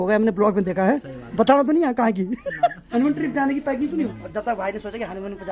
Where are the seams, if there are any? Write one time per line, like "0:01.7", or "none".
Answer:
0:01.2
0:02.8
0:04.1